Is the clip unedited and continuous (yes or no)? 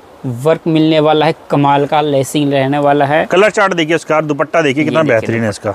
yes